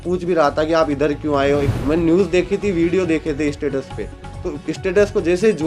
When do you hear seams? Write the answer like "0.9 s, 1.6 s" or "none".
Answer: 1.7 s